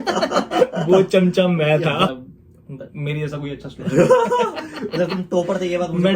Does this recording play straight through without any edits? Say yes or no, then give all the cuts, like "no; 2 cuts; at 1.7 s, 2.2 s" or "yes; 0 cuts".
no; 1 cut; at 2.1 s